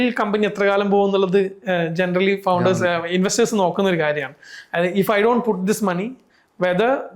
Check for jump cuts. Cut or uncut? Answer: uncut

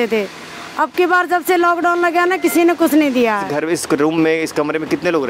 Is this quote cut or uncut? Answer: cut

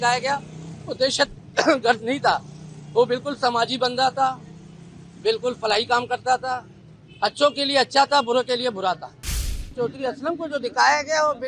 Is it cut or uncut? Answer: cut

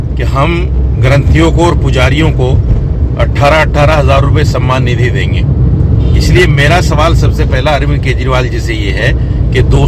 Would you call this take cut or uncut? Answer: uncut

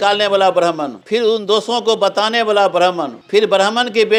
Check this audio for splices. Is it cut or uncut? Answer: uncut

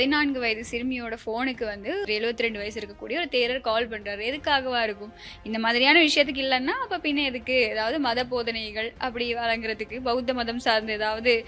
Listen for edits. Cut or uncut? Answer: cut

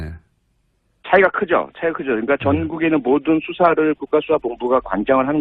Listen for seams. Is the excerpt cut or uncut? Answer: uncut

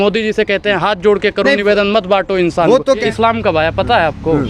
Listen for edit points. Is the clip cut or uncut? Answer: cut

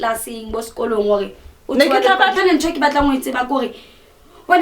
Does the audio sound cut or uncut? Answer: cut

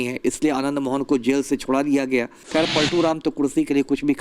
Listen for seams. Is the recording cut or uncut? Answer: cut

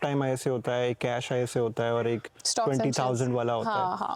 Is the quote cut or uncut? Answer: uncut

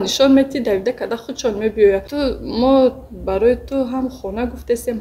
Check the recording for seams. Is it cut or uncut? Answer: cut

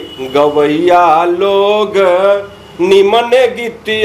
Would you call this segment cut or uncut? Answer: uncut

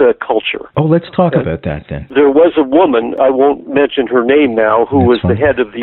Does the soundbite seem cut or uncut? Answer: uncut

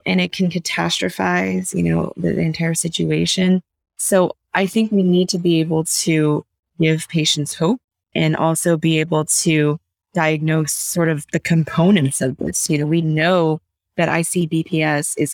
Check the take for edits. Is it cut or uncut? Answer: uncut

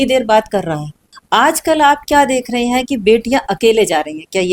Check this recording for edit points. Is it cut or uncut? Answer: cut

